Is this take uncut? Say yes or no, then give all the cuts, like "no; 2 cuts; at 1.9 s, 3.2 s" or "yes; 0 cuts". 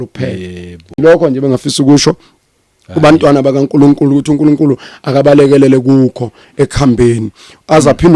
yes; 0 cuts